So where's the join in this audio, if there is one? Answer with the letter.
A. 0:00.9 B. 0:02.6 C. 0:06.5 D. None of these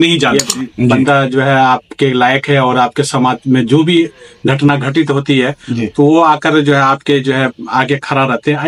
A